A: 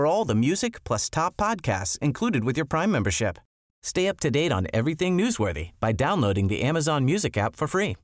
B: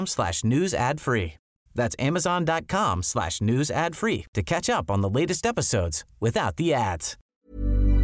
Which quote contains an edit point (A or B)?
B